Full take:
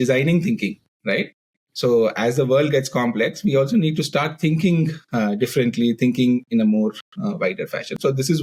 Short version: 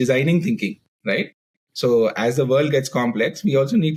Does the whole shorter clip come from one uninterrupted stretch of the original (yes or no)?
yes